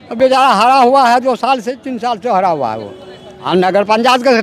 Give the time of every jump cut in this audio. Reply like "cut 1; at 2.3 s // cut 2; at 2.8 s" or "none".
cut 1; at 3.5 s